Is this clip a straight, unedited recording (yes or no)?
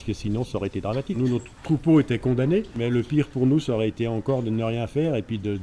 no